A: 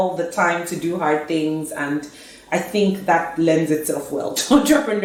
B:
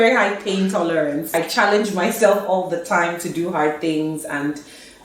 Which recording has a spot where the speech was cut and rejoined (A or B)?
B